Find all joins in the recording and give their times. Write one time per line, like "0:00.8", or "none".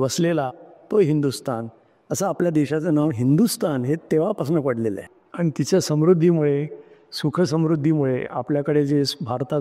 0:05.0